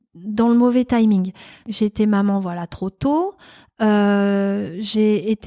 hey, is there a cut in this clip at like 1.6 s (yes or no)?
yes